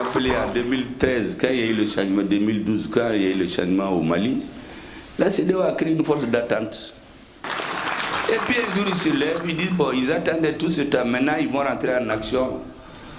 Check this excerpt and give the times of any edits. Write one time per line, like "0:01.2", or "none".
0:07.5